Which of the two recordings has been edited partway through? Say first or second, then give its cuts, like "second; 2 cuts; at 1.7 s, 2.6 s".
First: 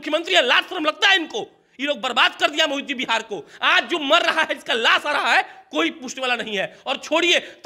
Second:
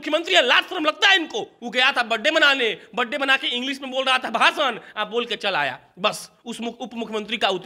second; 1 cut; at 1.6 s